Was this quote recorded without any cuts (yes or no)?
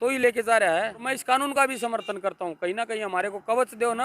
no